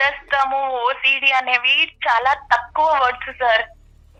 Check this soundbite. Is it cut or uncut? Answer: uncut